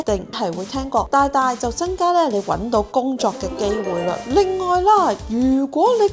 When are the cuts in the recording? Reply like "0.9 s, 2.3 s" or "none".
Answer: 4.2 s